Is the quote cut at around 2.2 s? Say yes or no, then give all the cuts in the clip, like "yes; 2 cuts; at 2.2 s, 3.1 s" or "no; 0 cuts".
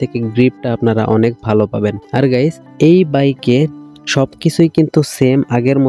no; 0 cuts